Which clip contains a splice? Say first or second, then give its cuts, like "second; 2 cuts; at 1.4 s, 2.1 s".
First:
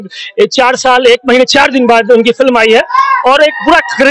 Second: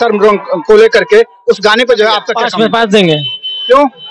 second; 1 cut; at 2.3 s